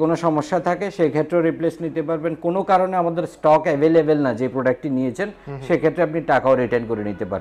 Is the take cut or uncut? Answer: uncut